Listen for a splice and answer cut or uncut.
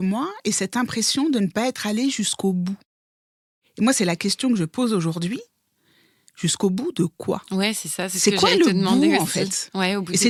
uncut